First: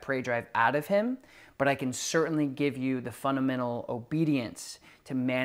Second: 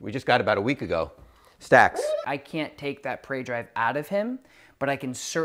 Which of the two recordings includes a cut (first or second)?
second